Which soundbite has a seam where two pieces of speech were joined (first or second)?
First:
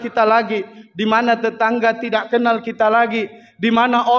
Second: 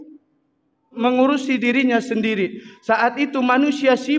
second